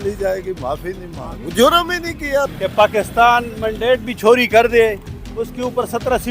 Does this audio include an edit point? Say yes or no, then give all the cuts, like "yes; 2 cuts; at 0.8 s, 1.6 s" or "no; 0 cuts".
yes; 1 cut; at 2.5 s